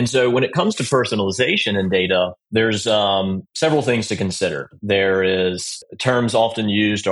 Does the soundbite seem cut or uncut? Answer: cut